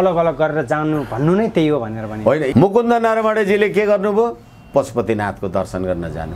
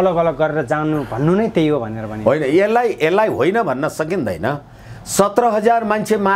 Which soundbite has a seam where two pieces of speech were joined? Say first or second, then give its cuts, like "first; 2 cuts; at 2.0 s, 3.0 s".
first; 1 cut; at 2.5 s